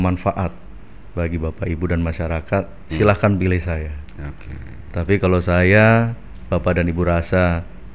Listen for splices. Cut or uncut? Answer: uncut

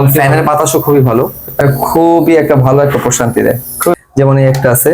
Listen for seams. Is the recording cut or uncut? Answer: cut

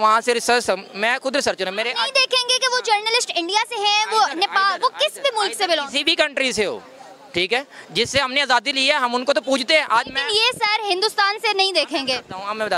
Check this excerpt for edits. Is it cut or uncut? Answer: uncut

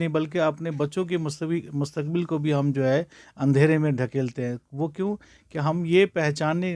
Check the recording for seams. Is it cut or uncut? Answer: uncut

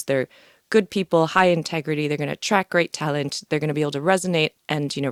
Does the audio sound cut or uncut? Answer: uncut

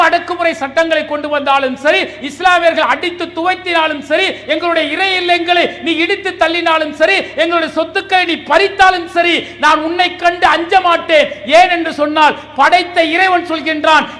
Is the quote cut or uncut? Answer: uncut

